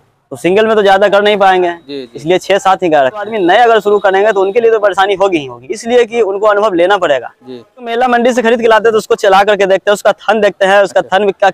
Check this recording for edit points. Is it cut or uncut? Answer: cut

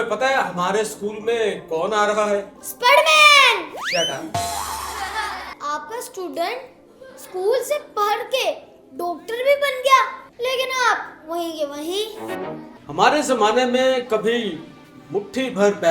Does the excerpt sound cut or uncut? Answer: cut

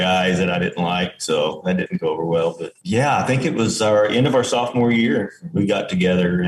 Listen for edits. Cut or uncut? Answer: uncut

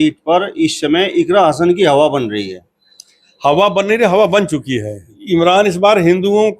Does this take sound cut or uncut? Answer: cut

